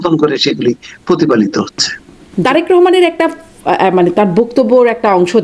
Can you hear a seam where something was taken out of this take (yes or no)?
yes